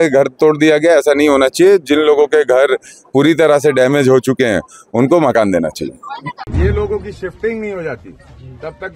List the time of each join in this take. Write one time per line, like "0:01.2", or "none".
none

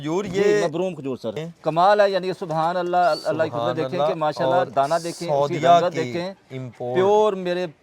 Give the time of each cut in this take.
0:01.5

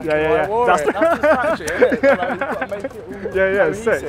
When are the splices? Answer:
0:00.8
0:03.1

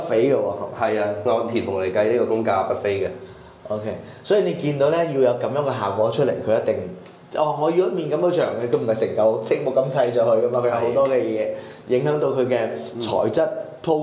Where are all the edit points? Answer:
none

